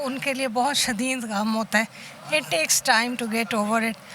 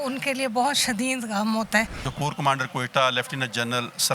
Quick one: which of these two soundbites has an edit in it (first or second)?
second